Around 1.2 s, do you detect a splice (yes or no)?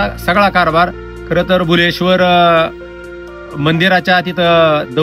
no